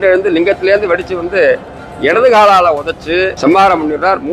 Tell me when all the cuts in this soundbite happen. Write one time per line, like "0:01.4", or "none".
0:03.4